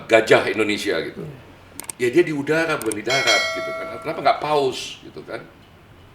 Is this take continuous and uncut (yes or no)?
yes